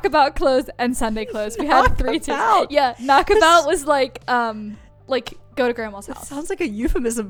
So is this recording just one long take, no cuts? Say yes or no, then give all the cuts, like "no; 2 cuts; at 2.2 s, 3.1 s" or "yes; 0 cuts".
yes; 0 cuts